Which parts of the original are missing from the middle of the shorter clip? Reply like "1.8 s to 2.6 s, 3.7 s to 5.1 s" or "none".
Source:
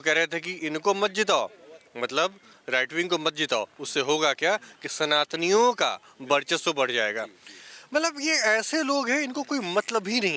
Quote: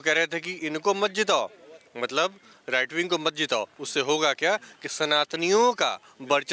none